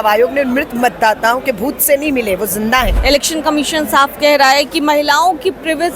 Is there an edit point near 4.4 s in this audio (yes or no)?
no